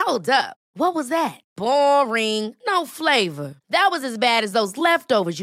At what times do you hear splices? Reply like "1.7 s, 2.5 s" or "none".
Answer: none